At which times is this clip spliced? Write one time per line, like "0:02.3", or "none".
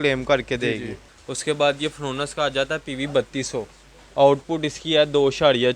0:00.9